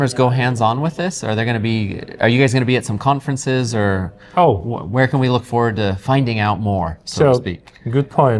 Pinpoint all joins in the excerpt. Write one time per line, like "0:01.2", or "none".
none